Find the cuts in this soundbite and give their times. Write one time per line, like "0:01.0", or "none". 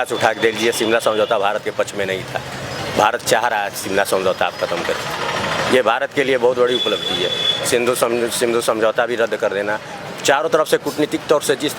none